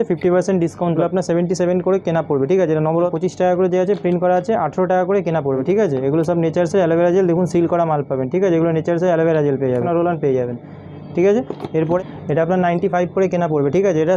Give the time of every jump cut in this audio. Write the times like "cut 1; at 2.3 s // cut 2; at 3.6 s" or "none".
cut 1; at 1.0 s // cut 2; at 3.1 s // cut 3; at 5.6 s // cut 4; at 9.8 s // cut 5; at 12.0 s